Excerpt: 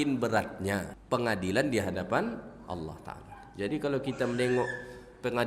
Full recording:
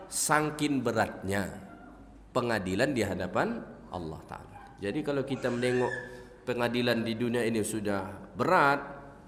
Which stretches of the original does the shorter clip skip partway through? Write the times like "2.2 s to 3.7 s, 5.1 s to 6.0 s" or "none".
1.6 s to 2.2 s

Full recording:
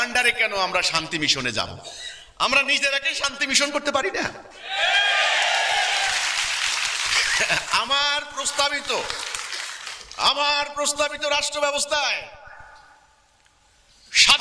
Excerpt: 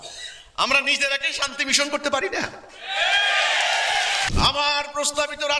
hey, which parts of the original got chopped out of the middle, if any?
6.1 s to 10.1 s

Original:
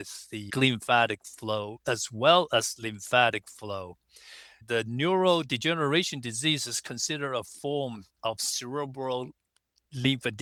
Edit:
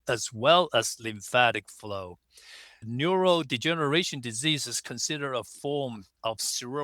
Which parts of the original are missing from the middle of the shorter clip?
4.7 s to 4.9 s

